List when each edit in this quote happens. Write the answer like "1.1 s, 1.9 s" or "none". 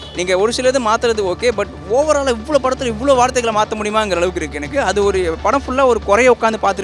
none